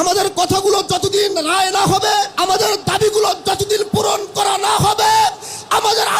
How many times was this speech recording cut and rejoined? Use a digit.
1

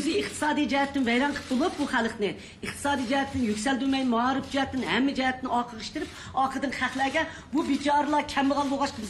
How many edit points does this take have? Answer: 1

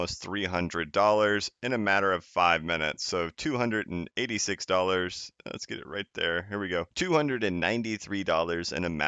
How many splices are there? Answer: 1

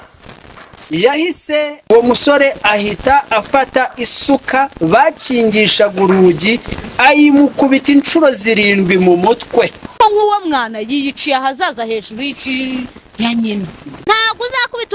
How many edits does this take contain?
3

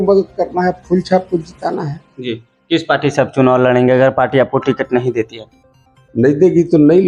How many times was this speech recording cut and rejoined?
0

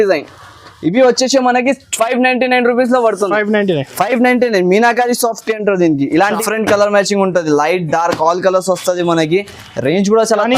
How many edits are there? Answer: 1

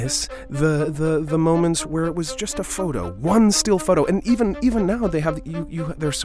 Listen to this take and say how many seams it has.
1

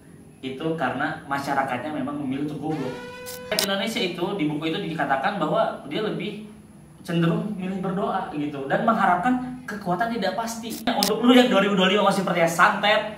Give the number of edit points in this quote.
2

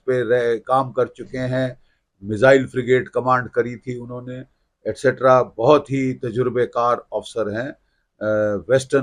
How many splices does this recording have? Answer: 0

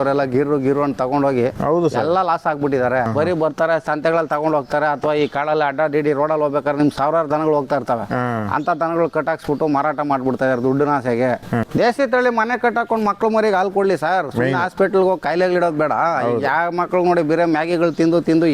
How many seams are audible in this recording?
2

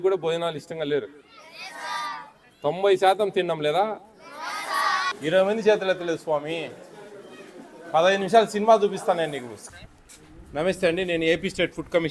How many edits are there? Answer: 2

